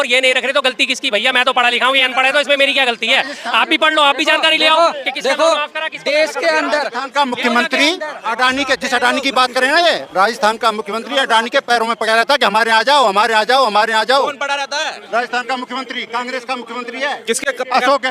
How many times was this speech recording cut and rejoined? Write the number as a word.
zero